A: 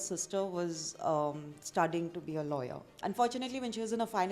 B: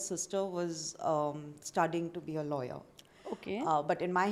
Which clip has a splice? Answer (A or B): A